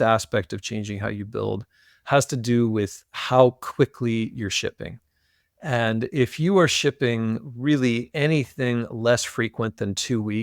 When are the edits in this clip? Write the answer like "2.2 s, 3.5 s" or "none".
none